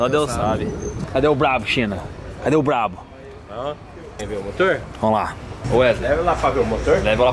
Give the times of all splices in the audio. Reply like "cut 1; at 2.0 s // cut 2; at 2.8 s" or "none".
cut 1; at 1.0 s // cut 2; at 4.2 s // cut 3; at 5.5 s